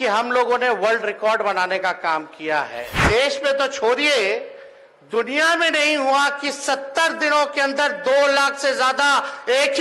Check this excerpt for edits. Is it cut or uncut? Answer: cut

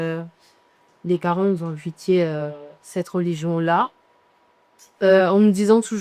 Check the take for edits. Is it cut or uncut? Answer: uncut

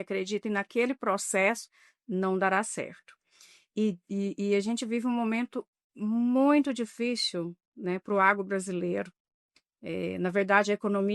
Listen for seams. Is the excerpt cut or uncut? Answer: uncut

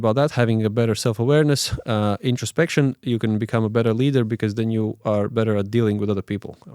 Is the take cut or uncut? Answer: uncut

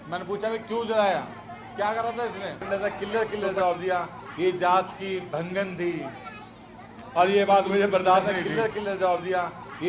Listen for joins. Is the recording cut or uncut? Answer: cut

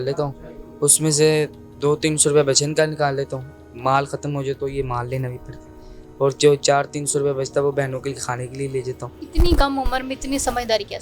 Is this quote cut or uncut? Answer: cut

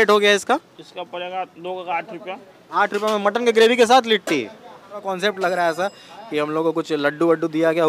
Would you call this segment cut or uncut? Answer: cut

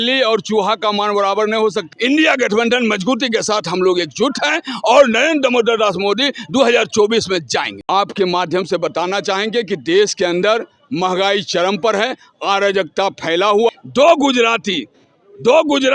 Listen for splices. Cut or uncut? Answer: cut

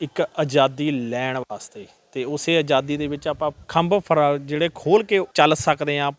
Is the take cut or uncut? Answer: cut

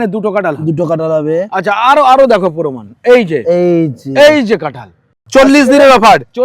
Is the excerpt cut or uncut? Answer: cut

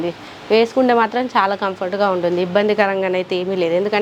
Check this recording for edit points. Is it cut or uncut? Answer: uncut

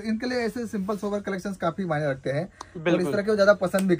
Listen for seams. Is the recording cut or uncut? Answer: uncut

